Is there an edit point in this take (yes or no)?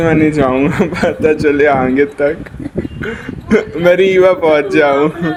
no